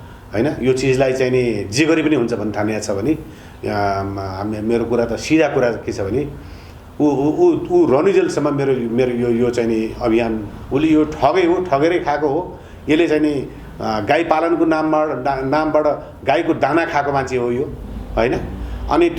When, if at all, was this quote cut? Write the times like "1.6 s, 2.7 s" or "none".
10.5 s